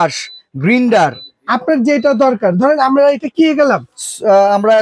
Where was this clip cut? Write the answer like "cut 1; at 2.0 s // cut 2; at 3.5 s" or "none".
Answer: none